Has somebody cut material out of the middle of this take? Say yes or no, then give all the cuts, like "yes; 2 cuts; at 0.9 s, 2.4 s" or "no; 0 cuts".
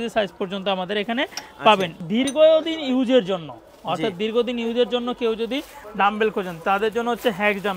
yes; 1 cut; at 2.0 s